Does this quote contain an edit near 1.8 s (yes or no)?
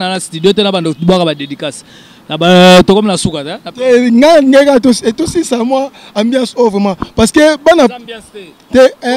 no